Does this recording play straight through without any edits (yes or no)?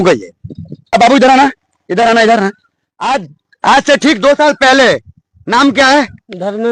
no